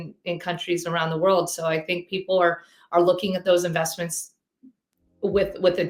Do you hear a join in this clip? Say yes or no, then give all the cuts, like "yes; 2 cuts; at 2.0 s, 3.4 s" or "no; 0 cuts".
no; 0 cuts